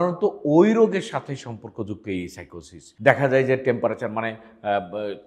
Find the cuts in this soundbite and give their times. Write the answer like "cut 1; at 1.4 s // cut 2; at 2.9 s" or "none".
none